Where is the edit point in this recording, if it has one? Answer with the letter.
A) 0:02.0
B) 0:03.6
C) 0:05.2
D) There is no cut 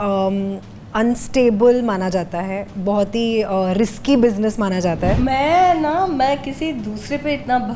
C